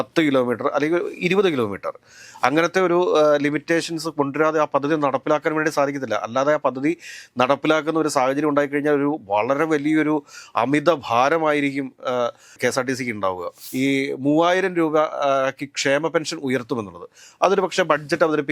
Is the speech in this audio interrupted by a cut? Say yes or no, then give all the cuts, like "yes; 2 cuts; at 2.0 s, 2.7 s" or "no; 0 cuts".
yes; 2 cuts; at 12.5 s, 13.6 s